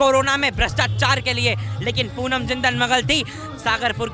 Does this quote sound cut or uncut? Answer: uncut